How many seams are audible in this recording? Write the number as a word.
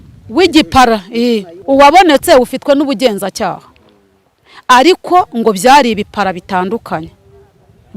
one